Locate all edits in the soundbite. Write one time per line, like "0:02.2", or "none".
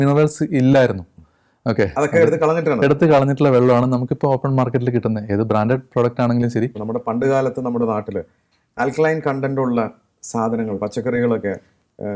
0:06.8